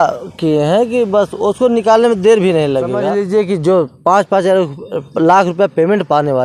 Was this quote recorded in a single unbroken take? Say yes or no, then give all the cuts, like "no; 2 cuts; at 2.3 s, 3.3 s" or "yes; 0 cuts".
no; 1 cut; at 3.0 s